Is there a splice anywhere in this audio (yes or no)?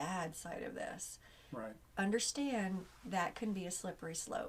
no